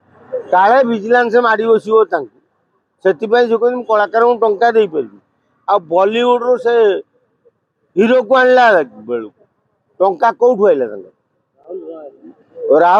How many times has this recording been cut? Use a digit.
0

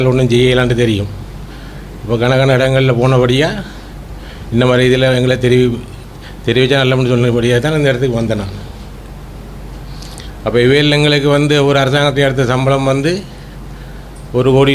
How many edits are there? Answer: 0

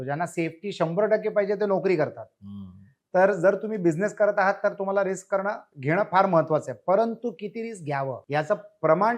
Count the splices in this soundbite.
1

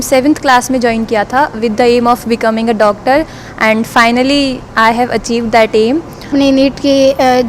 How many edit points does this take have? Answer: 1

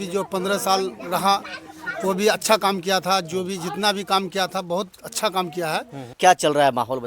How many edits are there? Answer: 1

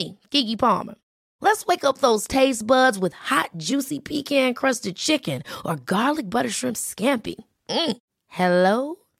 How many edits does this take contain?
0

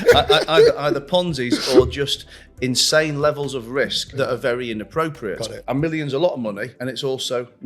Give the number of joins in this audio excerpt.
3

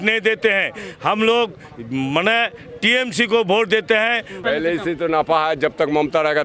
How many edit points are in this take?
1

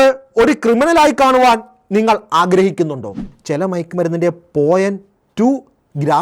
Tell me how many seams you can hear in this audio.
1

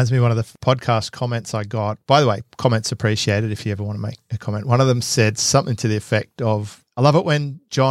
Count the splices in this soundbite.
0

